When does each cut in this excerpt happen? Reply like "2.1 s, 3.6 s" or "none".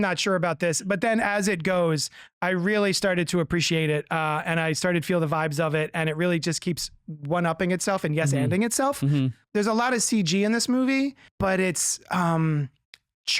9.4 s, 11.2 s